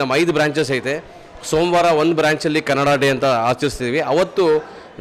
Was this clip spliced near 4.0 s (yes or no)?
no